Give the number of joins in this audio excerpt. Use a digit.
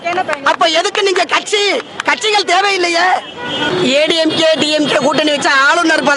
1